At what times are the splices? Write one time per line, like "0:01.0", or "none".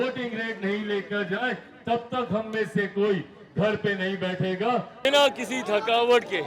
0:05.1